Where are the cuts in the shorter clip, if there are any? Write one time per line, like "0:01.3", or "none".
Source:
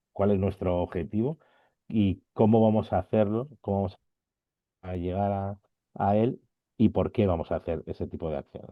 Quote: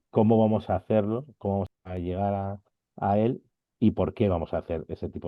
0:01.8